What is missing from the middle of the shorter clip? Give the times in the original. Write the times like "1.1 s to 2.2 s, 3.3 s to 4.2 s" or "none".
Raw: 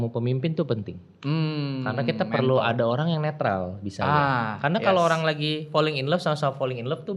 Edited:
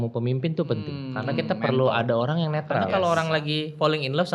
1.0 s to 1.7 s, 3.6 s to 4.8 s